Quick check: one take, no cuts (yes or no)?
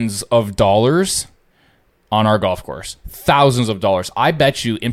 yes